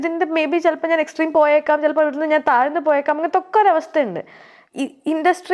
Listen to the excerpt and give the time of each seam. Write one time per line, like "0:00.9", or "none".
0:04.6